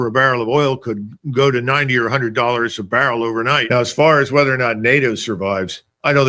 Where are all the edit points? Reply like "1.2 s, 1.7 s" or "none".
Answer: 3.6 s